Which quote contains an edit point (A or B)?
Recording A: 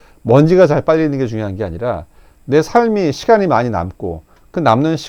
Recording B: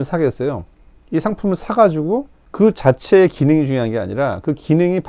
B